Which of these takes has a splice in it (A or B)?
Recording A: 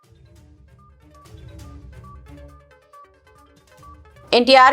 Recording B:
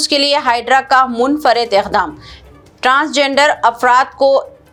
A